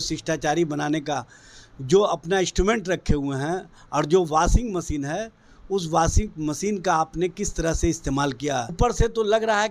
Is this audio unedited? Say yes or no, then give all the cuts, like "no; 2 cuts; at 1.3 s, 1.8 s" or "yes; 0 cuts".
no; 1 cut; at 8.7 s